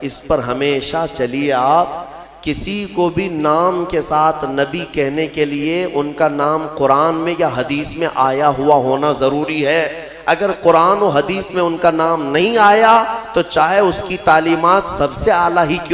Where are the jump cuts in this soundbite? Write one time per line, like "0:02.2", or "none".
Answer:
none